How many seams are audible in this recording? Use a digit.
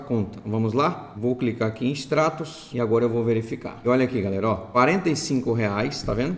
0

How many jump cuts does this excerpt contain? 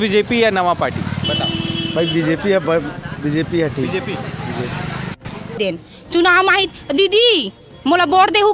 1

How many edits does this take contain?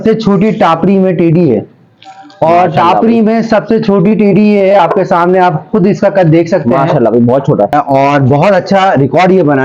1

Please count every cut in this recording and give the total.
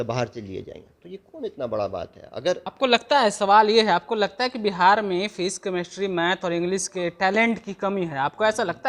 1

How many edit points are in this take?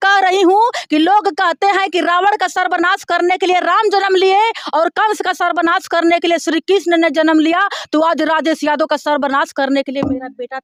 0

